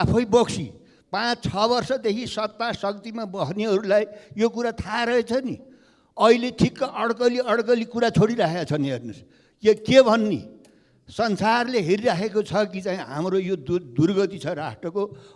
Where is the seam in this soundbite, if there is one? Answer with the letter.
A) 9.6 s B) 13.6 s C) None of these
C